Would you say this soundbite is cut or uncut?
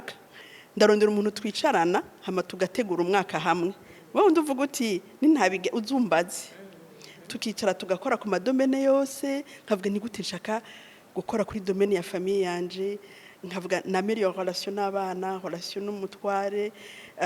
uncut